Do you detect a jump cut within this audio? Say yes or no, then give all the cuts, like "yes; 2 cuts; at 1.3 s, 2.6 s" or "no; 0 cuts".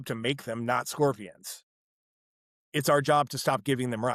no; 0 cuts